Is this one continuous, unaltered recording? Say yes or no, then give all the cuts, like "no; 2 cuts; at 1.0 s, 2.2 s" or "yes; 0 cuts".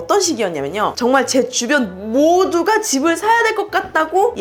yes; 0 cuts